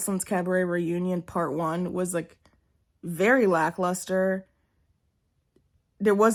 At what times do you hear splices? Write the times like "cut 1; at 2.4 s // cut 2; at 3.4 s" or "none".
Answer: none